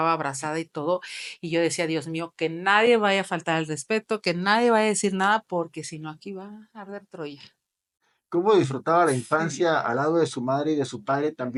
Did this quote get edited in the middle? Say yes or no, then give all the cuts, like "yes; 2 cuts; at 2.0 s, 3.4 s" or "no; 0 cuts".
no; 0 cuts